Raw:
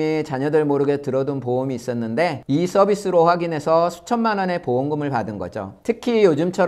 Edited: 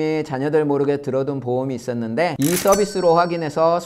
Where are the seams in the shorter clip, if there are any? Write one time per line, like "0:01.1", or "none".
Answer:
0:02.3